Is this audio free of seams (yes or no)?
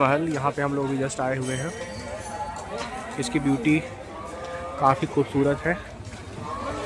yes